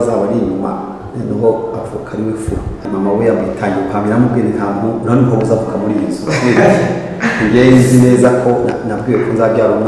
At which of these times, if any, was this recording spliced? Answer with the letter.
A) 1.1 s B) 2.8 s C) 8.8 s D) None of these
B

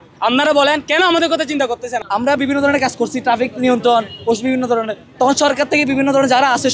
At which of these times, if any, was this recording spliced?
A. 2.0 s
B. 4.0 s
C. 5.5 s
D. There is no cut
A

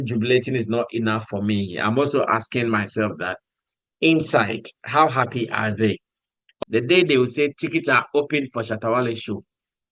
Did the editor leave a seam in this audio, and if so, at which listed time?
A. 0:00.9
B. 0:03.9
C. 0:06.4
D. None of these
C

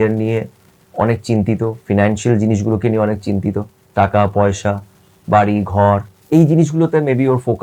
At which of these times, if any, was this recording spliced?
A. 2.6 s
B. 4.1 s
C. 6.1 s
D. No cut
C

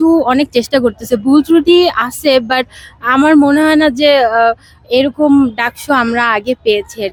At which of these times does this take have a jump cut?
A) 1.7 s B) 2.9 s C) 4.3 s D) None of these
D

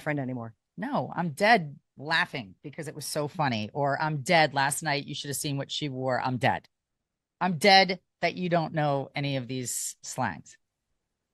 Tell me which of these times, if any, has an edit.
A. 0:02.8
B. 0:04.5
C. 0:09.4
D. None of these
D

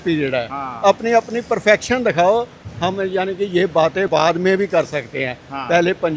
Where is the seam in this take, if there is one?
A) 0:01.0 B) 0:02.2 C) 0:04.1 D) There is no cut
C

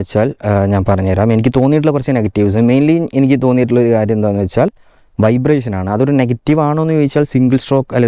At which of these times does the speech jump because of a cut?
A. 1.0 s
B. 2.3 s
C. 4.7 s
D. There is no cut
D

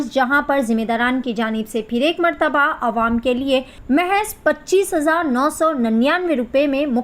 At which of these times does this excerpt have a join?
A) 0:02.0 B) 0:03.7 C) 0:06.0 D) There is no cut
B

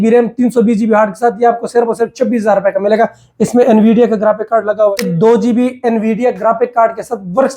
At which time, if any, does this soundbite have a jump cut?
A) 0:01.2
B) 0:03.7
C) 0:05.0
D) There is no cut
C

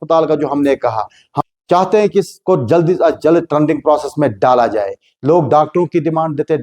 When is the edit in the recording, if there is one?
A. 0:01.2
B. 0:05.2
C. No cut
A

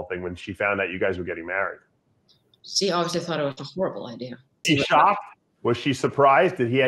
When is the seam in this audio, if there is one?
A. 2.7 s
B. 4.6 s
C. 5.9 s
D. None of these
B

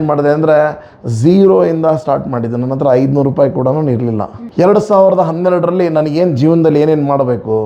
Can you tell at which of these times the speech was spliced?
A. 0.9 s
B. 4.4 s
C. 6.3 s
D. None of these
B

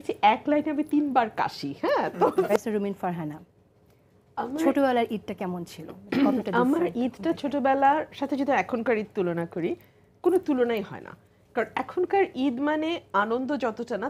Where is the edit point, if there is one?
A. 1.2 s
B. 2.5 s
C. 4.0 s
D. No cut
B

